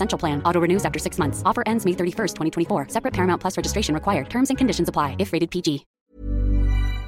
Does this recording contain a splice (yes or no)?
yes